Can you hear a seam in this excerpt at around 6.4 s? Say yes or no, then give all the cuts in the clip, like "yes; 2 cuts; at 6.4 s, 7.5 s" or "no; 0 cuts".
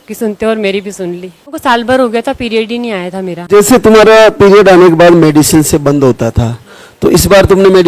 no; 2 cuts; at 1.6 s, 3.5 s